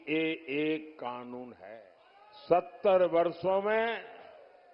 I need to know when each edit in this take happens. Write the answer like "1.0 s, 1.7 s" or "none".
1.7 s